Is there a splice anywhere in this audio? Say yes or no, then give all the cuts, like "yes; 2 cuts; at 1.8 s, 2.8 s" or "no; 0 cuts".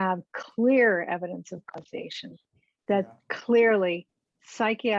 no; 0 cuts